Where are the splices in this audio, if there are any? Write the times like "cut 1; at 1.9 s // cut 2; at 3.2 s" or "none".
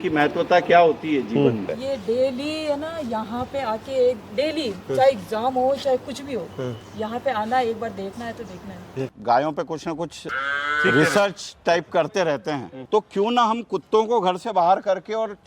cut 1; at 1.6 s // cut 2; at 9.1 s // cut 3; at 10.2 s // cut 4; at 12.7 s